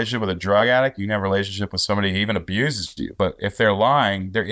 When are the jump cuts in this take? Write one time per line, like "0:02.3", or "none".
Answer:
none